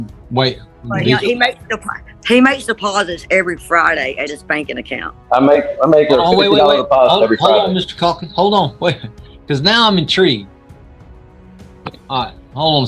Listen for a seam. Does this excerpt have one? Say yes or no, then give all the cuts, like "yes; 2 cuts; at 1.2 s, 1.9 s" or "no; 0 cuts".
no; 0 cuts